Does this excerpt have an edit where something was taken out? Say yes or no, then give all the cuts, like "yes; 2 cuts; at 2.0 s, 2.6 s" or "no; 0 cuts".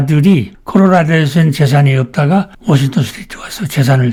no; 0 cuts